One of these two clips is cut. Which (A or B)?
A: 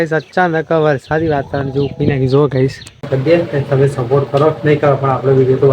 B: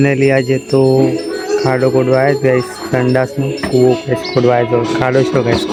A